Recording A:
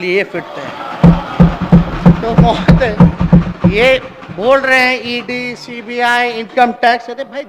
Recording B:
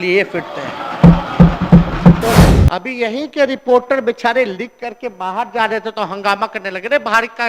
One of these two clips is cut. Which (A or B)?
B